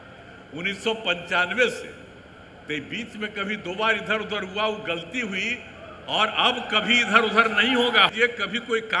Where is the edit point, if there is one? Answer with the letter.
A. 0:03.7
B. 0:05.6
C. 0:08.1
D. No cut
C